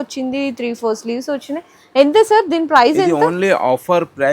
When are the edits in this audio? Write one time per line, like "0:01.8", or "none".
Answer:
none